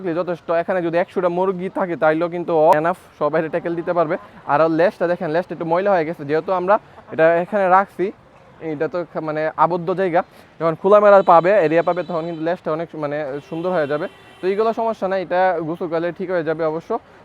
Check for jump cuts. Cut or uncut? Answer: cut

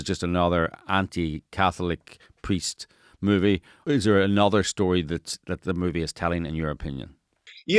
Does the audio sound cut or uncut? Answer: cut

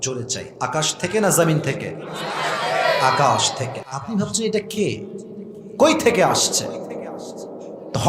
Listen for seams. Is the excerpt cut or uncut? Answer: cut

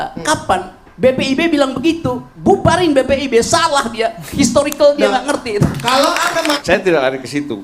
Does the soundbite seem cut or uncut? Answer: cut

